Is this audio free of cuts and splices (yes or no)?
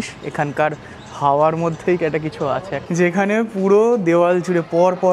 no